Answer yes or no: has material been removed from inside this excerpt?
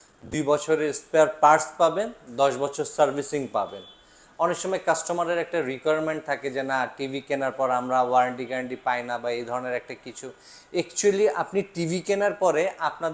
no